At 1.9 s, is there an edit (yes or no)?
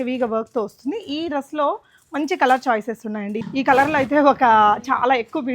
no